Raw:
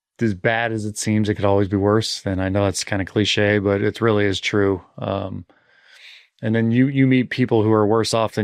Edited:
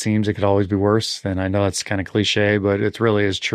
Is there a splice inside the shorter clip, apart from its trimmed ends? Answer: no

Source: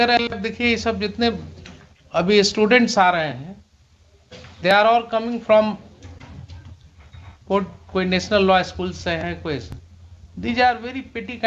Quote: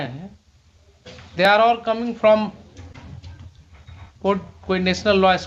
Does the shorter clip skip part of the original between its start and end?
no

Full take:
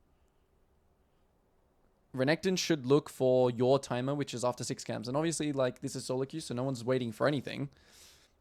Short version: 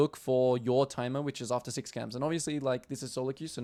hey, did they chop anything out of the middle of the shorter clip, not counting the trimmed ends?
no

